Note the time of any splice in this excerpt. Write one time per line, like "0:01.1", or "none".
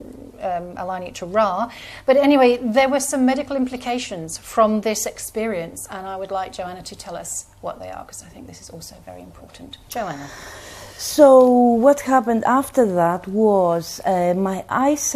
0:13.2